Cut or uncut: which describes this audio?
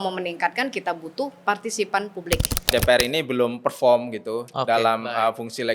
cut